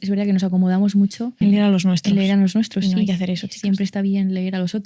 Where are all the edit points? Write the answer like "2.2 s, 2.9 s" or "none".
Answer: 1.4 s